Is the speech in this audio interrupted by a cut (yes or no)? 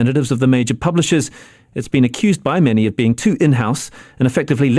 yes